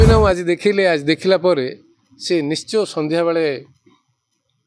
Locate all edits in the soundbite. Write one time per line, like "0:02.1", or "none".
none